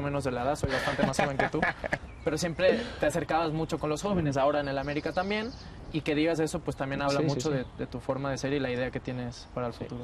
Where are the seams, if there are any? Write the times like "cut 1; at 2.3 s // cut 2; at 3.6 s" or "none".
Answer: none